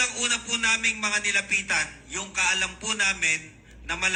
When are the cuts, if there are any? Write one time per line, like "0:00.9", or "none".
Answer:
none